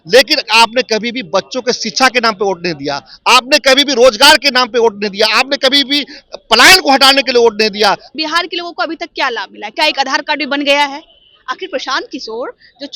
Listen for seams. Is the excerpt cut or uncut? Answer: cut